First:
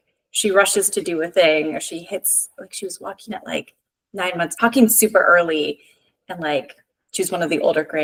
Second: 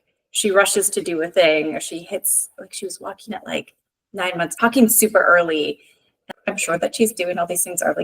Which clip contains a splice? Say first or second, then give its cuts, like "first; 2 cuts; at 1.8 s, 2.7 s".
second; 1 cut; at 6.3 s